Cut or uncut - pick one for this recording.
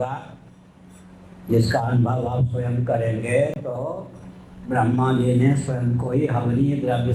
uncut